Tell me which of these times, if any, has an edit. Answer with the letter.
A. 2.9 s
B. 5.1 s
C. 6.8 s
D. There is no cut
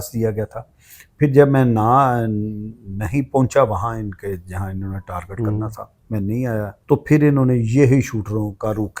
C